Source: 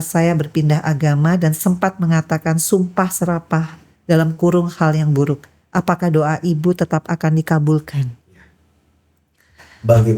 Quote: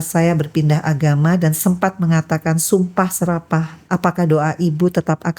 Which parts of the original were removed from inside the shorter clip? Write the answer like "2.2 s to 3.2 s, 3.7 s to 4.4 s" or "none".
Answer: 3.8 s to 5.6 s